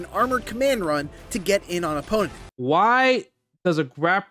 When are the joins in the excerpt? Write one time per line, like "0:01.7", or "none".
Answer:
0:02.4